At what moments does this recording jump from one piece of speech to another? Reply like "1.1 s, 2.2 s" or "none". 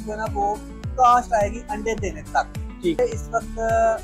3.0 s